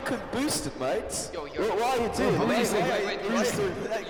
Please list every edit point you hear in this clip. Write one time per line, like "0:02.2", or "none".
none